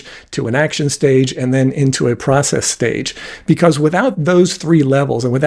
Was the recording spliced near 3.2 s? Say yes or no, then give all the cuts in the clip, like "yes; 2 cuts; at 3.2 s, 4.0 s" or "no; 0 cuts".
no; 0 cuts